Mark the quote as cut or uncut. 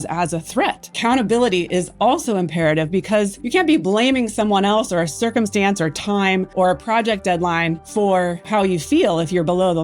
cut